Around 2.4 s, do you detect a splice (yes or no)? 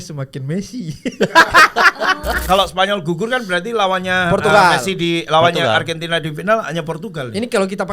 yes